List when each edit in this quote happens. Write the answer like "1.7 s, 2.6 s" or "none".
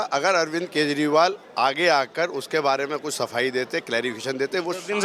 none